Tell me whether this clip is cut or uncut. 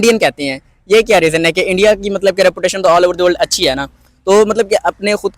cut